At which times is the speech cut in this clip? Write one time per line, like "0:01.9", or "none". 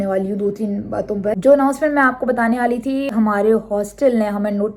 0:01.4
0:03.1